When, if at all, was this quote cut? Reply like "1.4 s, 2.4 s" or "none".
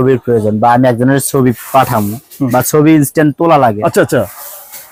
none